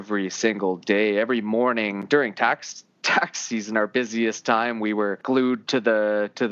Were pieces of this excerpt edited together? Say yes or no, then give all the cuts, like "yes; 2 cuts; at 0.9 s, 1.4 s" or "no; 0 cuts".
yes; 2 cuts; at 2.0 s, 5.2 s